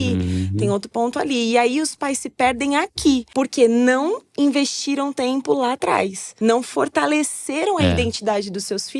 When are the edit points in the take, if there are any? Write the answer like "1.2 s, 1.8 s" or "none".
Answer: 3.3 s, 6.2 s